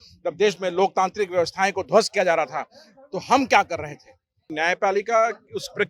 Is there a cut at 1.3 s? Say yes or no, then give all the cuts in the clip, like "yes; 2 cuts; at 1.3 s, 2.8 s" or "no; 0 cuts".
no; 1 cut; at 4.5 s